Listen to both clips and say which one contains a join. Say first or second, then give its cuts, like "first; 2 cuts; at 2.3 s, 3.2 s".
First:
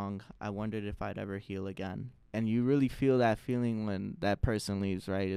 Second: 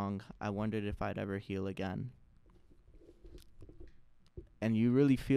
first; 1 cut; at 2.2 s